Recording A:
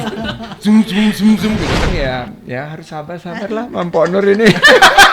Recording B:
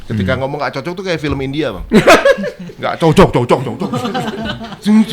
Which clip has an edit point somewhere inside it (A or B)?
A